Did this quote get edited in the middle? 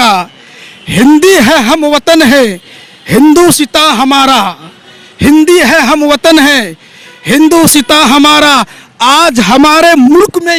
no; 0 cuts

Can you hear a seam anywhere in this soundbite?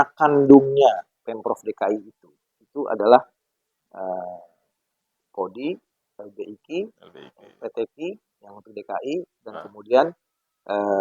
no; 0 cuts

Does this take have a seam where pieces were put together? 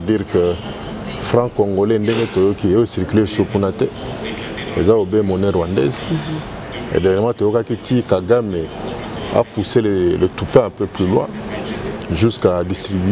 no; 0 cuts

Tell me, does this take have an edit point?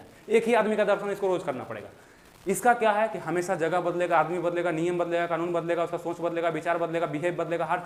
no; 0 cuts

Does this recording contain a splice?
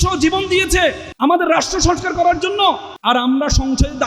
yes; 2 cuts; at 1.1 s, 2.9 s

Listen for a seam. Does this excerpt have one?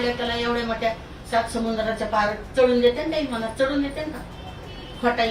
no; 0 cuts

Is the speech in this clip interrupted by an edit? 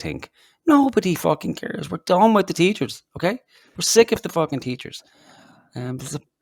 no; 0 cuts

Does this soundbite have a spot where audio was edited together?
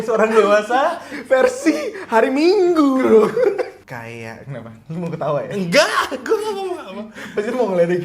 yes; 1 cut; at 3.8 s

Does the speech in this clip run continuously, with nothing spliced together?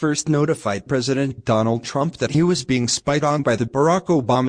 no; 1 cut; at 1.2 s

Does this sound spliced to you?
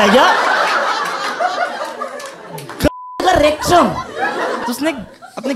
yes; 1 cut; at 4.6 s

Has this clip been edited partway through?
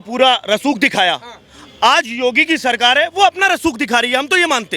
no; 0 cuts

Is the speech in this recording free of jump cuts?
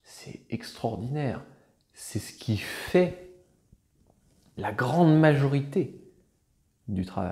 yes; 0 cuts

